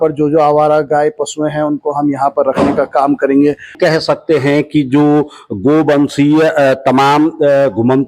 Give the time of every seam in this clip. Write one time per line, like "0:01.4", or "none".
0:03.7